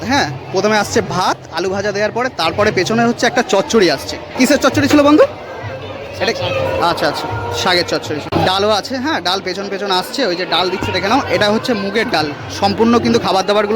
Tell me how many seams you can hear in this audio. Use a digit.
2